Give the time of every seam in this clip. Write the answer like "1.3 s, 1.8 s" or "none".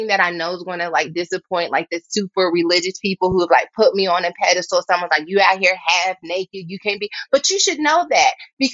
none